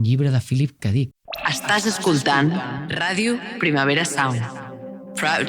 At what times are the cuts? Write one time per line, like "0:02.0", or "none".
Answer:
0:01.2